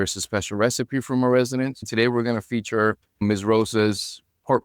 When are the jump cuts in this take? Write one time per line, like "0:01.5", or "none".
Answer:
0:01.9
0:03.2

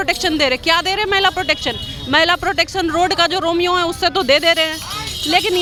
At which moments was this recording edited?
none

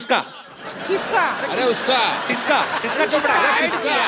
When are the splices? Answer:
none

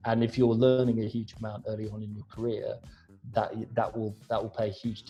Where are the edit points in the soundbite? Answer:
none

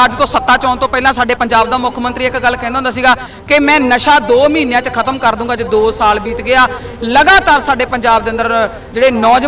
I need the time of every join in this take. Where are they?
none

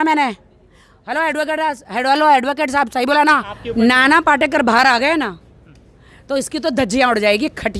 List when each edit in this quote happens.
0:03.6

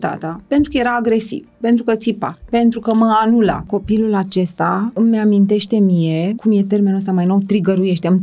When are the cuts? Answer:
0:03.7
0:04.9
0:06.4

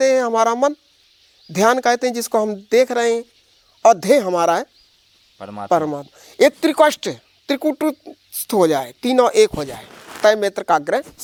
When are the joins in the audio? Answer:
none

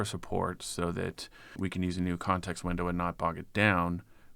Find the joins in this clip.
0:01.6

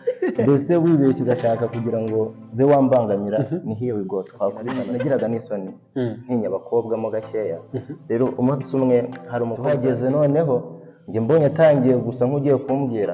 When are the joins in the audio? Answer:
0:04.7
0:09.6

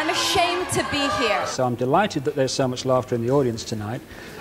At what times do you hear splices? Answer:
0:01.5

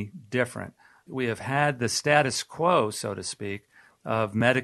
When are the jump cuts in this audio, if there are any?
0:01.0

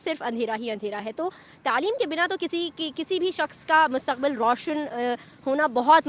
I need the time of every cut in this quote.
none

